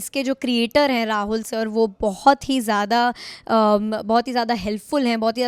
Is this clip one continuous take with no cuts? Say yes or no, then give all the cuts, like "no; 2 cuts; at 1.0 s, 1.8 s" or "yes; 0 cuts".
yes; 0 cuts